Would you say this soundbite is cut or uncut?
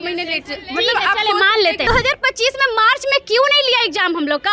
cut